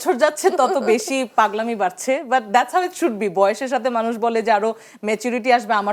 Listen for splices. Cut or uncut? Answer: uncut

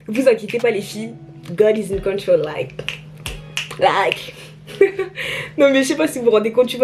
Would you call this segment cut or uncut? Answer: uncut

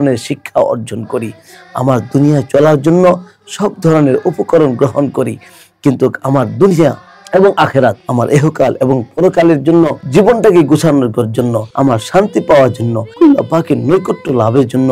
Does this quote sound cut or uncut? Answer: cut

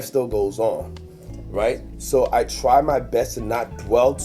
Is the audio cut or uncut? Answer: uncut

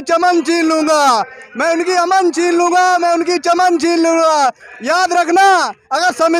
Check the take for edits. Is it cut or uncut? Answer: uncut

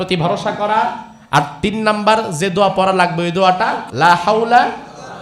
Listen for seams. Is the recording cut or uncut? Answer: cut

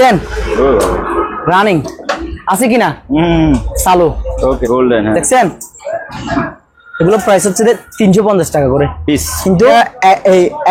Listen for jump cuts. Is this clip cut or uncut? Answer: cut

